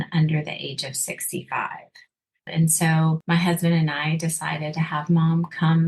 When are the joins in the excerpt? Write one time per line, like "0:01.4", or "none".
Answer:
0:02.5
0:03.2